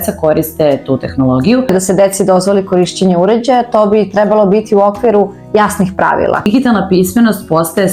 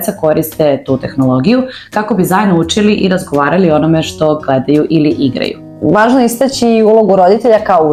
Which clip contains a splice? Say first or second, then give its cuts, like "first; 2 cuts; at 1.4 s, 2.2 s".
first; 2 cuts; at 1.7 s, 6.5 s